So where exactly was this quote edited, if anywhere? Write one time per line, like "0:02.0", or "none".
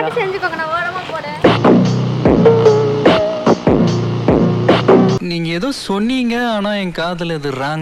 none